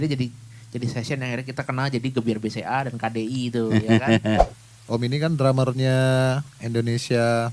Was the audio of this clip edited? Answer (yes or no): yes